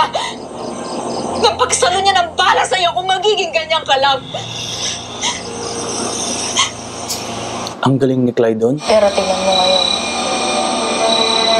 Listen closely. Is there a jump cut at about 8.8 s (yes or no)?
yes